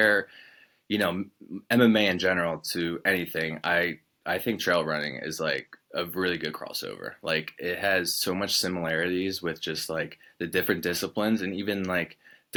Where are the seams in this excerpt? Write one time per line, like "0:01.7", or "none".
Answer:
none

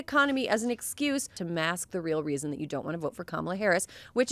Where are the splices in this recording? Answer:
0:01.4

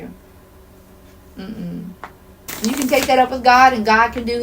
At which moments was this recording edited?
0:02.5

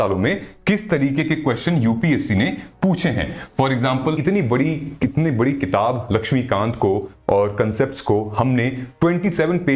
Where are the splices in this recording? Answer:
0:04.2

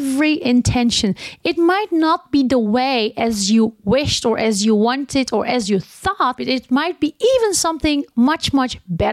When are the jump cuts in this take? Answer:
0:06.4

